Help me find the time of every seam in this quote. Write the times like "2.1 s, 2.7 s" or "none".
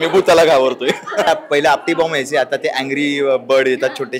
1.3 s